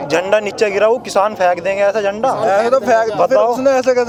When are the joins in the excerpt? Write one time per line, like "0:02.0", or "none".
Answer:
none